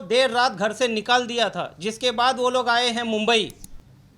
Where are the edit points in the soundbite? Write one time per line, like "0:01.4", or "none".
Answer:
none